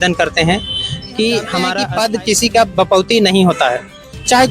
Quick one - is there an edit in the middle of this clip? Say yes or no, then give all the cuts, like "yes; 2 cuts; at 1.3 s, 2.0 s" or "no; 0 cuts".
yes; 1 cut; at 1.8 s